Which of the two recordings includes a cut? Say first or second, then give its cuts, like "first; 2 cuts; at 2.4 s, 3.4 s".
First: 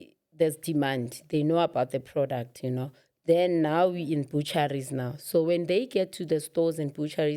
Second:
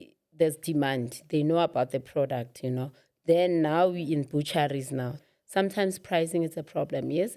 second; 1 cut; at 5.2 s